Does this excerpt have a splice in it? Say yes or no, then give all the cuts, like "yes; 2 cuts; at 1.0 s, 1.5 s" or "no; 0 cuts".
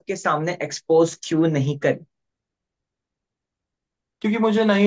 no; 0 cuts